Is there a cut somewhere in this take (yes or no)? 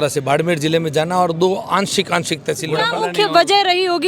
yes